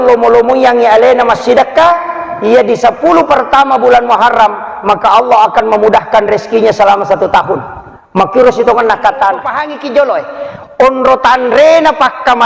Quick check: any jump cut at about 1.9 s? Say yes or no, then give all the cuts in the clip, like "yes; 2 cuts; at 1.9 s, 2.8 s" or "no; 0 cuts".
no; 1 cut; at 9.7 s